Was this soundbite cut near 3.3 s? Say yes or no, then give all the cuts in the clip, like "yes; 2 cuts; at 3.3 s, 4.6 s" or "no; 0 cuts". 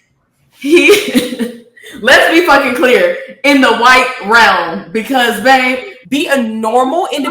no; 1 cut; at 5.9 s